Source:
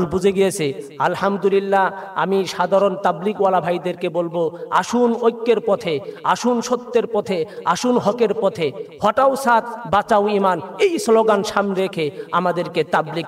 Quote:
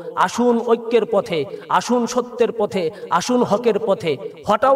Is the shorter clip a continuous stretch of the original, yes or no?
yes